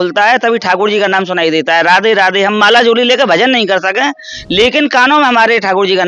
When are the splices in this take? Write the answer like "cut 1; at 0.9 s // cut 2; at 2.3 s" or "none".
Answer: none